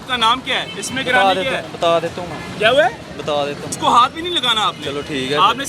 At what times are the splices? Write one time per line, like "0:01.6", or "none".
0:03.7